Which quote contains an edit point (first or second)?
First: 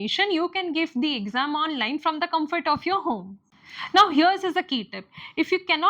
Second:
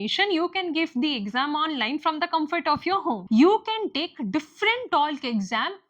second